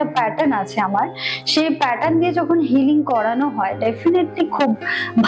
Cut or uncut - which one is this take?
uncut